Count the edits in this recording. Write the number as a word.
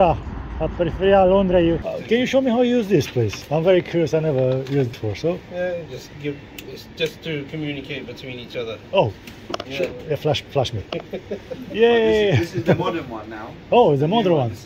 three